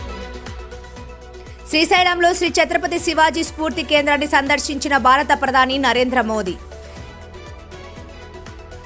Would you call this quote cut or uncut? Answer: cut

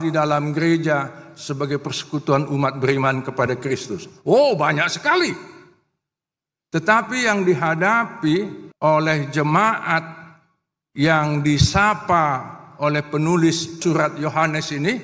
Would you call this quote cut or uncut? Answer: cut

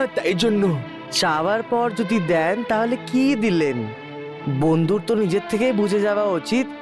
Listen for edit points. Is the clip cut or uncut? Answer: uncut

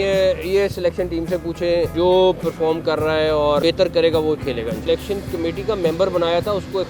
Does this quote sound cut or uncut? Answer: cut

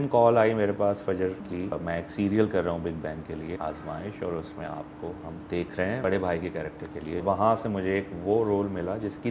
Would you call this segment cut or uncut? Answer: cut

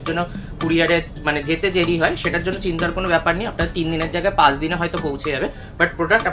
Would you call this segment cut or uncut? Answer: uncut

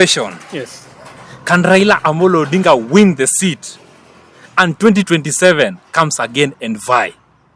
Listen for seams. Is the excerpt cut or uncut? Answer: uncut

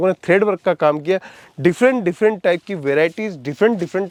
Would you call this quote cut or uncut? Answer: uncut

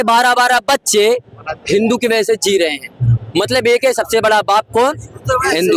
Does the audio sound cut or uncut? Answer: uncut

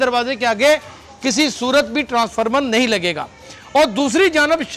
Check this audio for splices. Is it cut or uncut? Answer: uncut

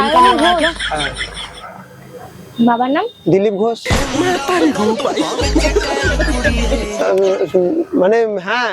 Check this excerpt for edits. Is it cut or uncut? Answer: uncut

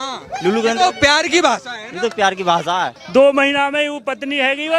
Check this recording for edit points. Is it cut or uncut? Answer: cut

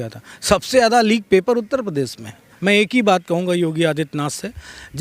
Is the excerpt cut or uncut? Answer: cut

